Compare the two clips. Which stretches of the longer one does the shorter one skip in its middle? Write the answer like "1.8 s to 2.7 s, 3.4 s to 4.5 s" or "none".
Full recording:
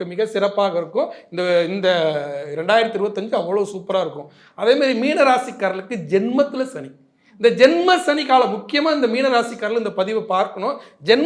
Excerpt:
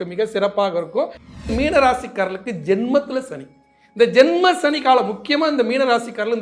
1.5 s to 4.9 s